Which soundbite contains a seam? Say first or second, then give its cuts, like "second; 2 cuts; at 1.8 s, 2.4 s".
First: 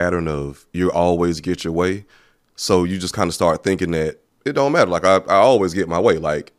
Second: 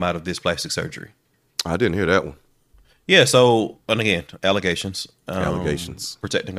first; 1 cut; at 4.3 s